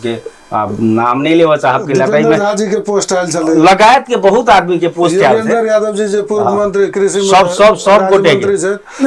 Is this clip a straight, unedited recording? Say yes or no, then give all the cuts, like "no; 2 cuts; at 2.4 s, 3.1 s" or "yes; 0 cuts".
yes; 0 cuts